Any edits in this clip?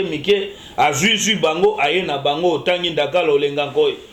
no; 0 cuts

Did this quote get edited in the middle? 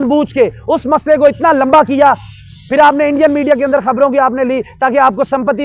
no; 0 cuts

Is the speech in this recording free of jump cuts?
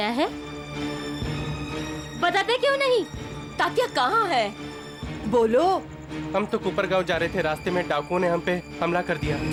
yes; 0 cuts

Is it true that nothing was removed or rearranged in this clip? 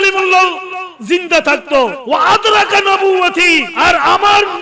no; 2 cuts; at 2.0 s, 3.7 s

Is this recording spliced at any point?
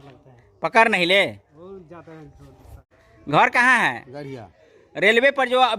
yes; 1 cut; at 2.9 s

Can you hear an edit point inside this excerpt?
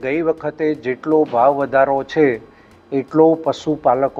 no; 0 cuts

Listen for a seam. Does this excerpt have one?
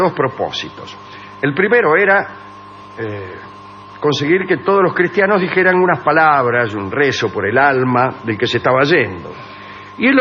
yes; 1 cut; at 8.1 s

